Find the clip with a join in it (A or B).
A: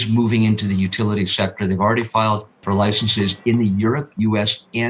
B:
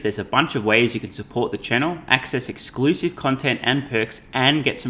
A